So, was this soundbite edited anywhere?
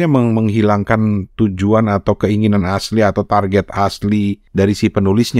yes; 1 cut; at 4.4 s

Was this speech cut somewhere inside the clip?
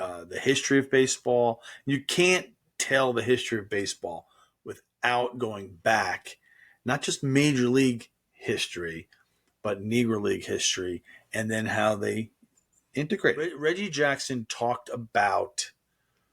yes; 1 cut; at 13.5 s

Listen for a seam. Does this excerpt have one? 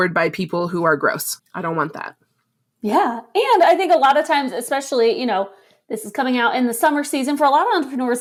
no; 0 cuts

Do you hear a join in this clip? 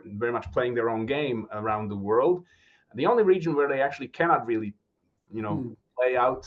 no; 0 cuts

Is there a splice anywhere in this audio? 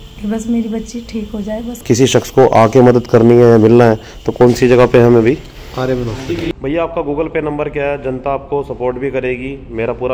yes; 2 cuts; at 1.8 s, 6.6 s

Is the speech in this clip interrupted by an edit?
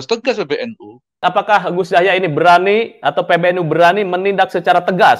yes; 1 cut; at 1.2 s

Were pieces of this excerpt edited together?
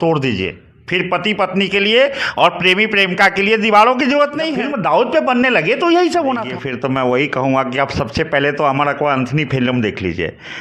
yes; 2 cuts; at 4.5 s, 6.6 s

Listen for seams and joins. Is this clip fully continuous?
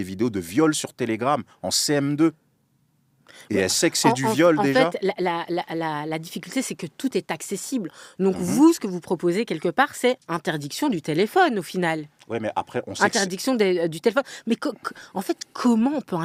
yes; 0 cuts

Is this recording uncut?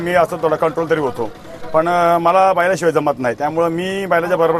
yes; 0 cuts

